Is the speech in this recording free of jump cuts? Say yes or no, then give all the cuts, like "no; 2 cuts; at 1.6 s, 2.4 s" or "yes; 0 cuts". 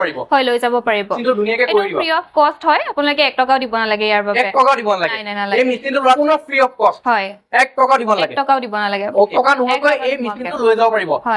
no; 3 cuts; at 1.1 s, 6.2 s, 9.3 s